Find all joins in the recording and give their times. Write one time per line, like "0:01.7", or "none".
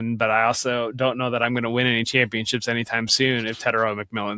none